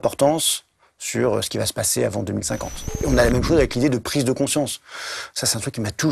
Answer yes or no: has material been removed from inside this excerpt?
yes